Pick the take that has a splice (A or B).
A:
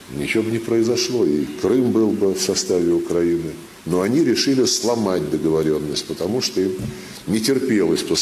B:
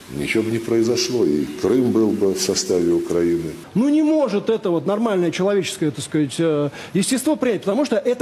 B